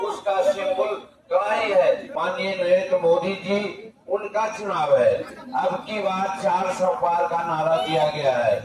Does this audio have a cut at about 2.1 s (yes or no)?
yes